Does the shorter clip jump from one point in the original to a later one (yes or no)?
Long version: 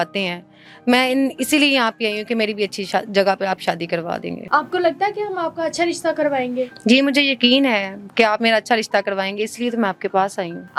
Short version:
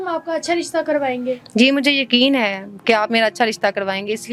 no